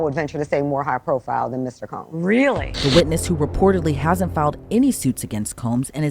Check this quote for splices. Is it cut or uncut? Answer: cut